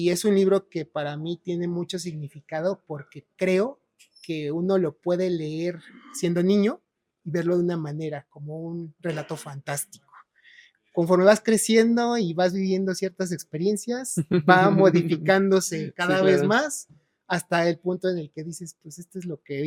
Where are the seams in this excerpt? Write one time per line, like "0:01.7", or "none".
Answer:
none